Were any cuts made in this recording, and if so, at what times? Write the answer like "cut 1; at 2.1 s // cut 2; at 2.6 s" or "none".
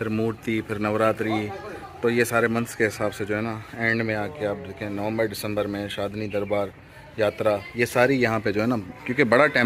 none